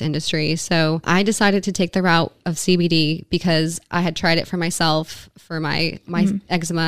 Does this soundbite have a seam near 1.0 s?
yes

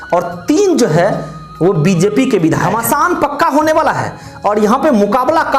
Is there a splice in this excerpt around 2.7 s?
yes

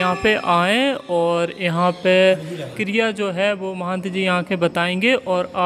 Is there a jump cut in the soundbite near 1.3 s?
no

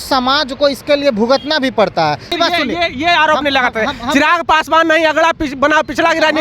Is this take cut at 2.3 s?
yes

